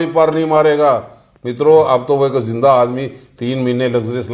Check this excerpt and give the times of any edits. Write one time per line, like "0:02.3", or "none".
none